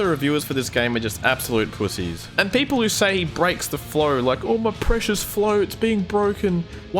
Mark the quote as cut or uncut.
cut